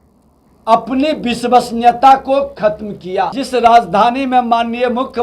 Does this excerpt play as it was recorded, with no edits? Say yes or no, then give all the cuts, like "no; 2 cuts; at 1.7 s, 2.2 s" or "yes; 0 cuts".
no; 1 cut; at 3.4 s